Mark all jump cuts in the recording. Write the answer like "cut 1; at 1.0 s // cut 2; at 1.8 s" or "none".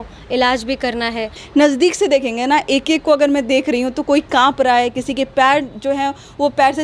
cut 1; at 1.3 s